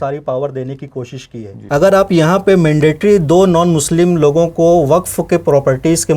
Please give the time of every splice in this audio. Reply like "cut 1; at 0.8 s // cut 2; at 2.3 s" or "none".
cut 1; at 1.6 s